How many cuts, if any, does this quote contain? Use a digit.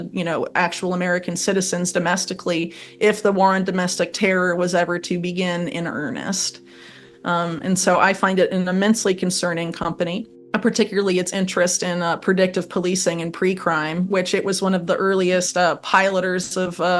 1